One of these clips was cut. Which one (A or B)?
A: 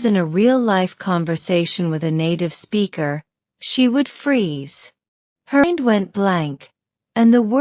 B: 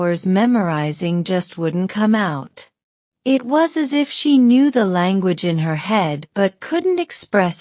A